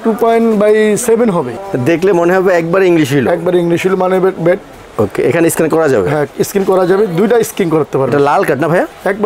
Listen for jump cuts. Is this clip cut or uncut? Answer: cut